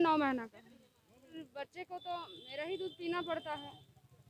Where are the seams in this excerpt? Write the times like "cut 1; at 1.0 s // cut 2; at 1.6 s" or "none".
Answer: cut 1; at 1.4 s